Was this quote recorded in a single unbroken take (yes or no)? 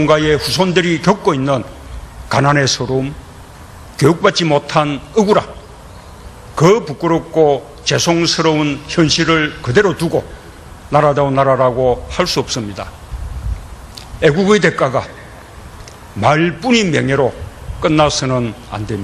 yes